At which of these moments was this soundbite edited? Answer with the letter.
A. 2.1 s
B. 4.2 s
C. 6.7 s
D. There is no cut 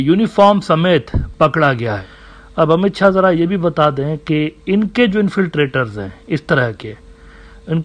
A